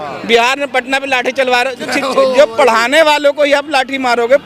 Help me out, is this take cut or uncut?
uncut